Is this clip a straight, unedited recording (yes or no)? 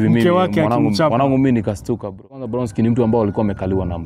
no